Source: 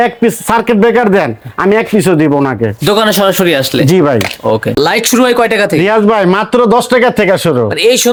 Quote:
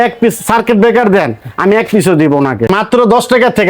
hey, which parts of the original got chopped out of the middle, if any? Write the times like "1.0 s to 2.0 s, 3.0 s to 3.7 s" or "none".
2.7 s to 6.3 s